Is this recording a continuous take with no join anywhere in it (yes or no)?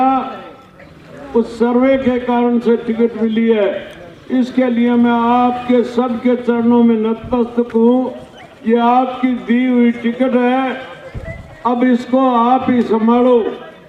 yes